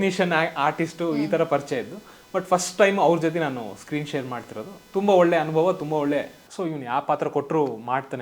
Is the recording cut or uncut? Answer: cut